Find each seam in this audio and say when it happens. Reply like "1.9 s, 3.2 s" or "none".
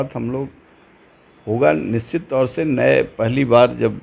none